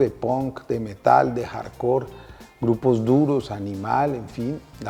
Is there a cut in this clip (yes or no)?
no